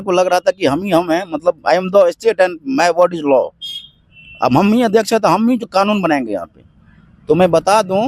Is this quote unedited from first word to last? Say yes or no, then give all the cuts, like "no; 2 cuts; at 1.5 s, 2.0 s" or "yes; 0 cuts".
yes; 0 cuts